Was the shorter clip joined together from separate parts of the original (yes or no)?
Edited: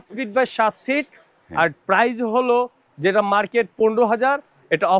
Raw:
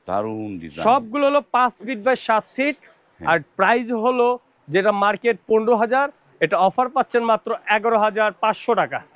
no